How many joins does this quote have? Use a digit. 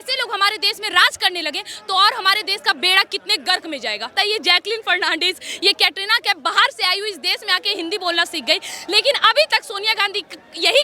1